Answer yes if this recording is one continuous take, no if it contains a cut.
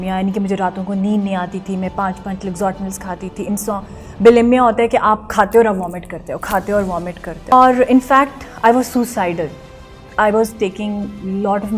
no